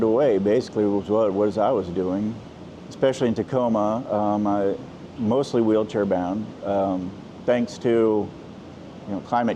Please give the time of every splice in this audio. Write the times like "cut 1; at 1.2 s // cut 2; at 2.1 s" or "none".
none